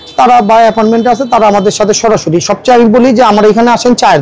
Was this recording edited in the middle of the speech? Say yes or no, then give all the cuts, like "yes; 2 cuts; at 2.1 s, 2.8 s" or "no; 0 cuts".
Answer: no; 0 cuts